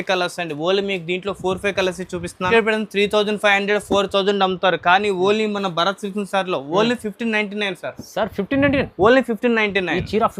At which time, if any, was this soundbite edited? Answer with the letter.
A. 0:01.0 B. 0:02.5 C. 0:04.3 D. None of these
B